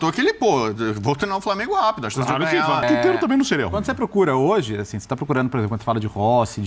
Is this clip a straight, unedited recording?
no; 1 cut; at 2.8 s

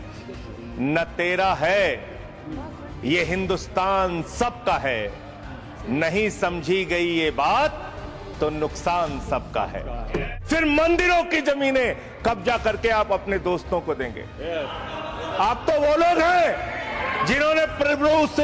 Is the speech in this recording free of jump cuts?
no; 1 cut; at 10.4 s

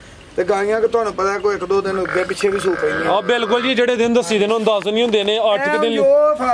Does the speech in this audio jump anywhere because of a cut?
no; 0 cuts

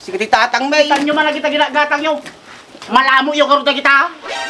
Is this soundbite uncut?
yes; 0 cuts

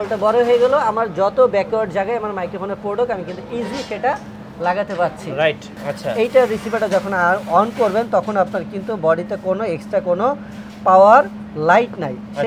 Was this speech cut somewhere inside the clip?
yes; 1 cut; at 5.8 s

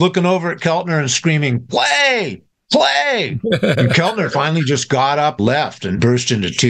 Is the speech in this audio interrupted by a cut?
yes; 1 cut; at 5.8 s

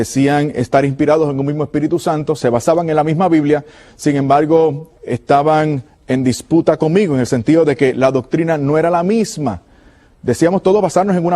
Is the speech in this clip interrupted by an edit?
yes; 1 cut; at 6.2 s

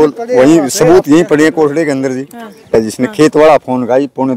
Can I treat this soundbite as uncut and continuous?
no; 1 cut; at 2.7 s

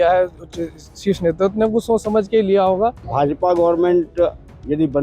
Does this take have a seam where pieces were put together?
yes; 1 cut; at 3.0 s

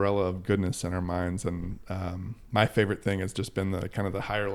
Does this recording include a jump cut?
no; 0 cuts

